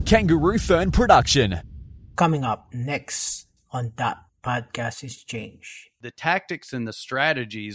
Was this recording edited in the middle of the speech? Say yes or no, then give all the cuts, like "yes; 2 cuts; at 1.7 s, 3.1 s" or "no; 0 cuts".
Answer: yes; 1 cut; at 5.9 s